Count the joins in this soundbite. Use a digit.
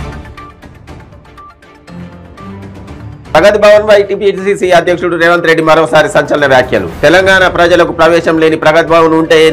1